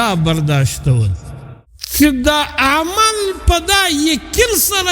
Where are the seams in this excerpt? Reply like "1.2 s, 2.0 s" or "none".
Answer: 1.5 s